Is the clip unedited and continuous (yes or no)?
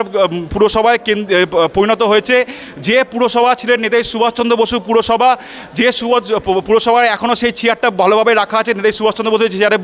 yes